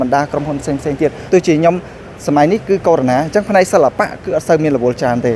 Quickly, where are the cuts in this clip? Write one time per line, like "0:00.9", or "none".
0:01.2